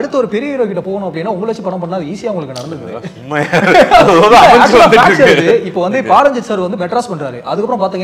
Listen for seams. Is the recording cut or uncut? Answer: uncut